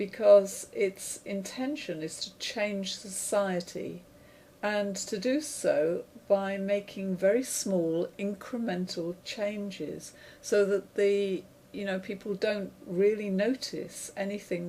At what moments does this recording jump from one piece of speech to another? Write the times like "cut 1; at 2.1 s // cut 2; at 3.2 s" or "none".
none